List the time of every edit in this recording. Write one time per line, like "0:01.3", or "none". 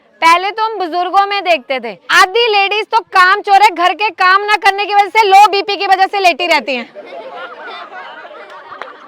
0:02.0